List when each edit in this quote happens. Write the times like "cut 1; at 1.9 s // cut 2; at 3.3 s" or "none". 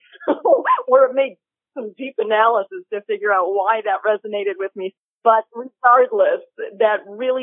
cut 1; at 4.9 s